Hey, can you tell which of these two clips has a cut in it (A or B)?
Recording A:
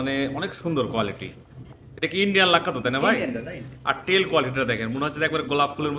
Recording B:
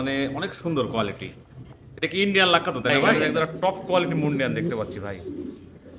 B